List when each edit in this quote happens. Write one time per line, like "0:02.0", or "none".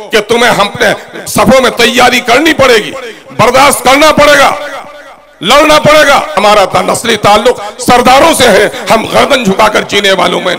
0:06.3